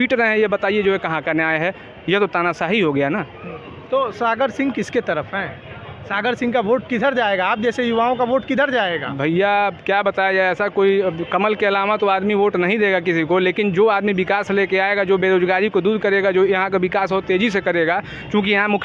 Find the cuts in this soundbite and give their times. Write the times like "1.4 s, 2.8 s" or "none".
none